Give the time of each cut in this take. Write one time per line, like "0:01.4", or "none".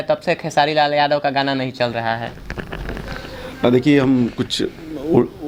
none

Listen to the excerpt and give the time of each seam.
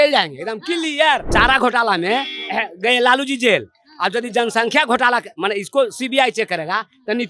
0:01.3

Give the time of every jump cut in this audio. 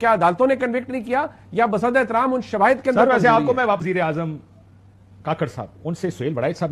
0:03.8

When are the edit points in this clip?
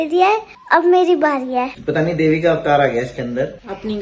0:01.8

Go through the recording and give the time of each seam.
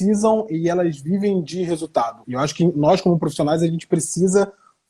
0:02.2

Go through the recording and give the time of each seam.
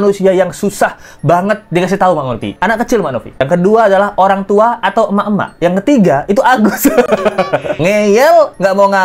0:02.5
0:07.7

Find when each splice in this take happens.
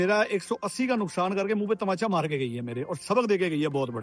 none

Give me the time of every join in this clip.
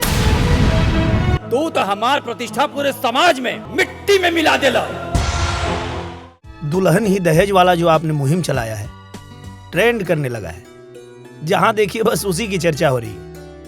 0:01.4
0:03.6
0:06.1

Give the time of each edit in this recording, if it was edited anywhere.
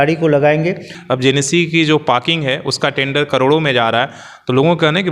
0:00.9

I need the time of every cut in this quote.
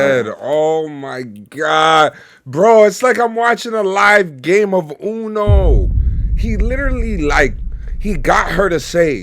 none

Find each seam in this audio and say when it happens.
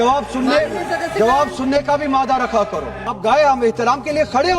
0:03.1

